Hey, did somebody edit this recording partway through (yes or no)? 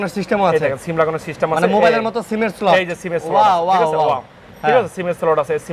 no